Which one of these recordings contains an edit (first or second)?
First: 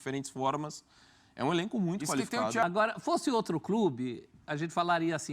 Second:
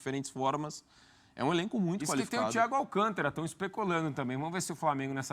first